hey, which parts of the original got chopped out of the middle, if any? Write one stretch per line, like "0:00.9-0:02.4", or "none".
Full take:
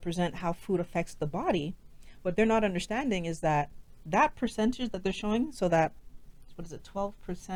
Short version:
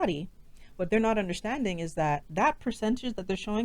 0:03.7-0:04.0